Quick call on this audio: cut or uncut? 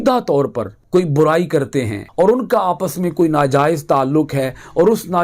cut